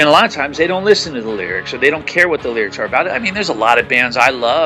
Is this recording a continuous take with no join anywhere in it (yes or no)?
yes